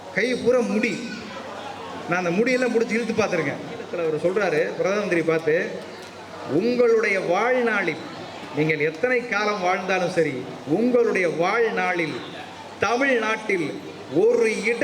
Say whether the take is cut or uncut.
cut